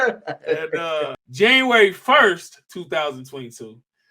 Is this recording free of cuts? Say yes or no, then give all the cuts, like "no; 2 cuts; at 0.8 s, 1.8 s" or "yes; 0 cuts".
no; 1 cut; at 1.2 s